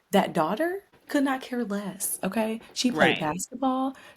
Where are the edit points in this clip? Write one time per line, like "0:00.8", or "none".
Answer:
0:00.9